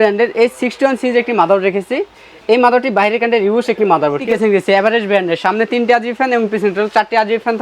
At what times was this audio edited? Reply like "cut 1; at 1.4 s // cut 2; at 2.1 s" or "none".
cut 1; at 4.2 s